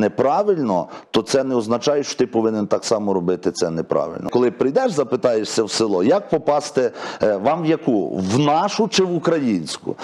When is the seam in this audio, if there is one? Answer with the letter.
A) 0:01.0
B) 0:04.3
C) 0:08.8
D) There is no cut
B